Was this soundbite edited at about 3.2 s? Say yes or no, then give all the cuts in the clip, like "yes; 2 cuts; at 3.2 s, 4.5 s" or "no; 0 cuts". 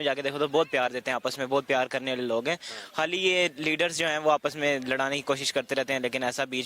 no; 1 cut; at 1.4 s